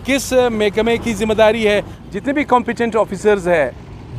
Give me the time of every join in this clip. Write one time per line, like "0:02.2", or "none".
0:01.9